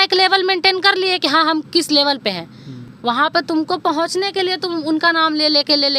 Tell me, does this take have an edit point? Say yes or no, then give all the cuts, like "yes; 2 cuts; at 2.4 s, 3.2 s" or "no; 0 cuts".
no; 0 cuts